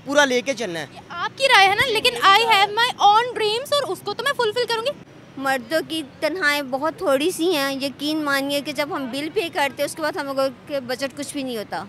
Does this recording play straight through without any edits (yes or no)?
no